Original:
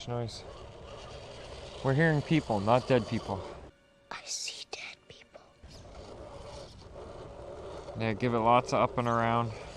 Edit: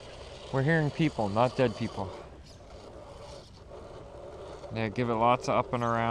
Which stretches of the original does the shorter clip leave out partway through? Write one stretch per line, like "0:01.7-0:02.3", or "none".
0:03.8-0:05.7